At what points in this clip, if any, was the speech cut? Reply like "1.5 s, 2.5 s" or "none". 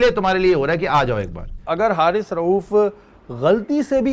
1.6 s